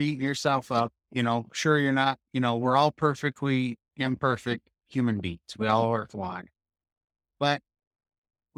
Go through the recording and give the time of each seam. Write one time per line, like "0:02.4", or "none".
none